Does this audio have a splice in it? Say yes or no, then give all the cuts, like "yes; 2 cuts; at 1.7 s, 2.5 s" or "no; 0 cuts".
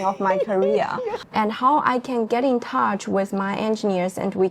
yes; 1 cut; at 1.2 s